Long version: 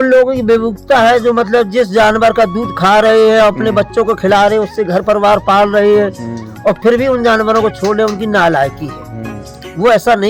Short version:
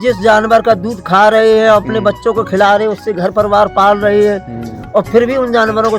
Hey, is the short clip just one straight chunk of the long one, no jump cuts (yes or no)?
yes